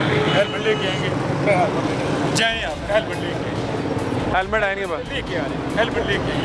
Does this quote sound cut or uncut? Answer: uncut